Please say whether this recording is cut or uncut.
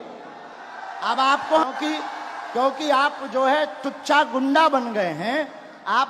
cut